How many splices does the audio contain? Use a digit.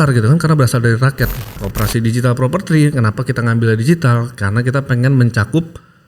1